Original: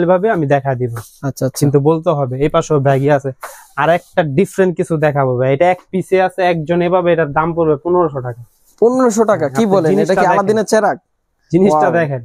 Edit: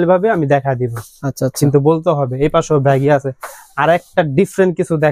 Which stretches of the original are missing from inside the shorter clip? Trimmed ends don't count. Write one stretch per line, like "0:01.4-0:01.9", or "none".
none